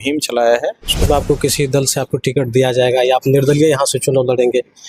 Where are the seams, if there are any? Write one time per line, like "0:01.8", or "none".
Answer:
0:01.0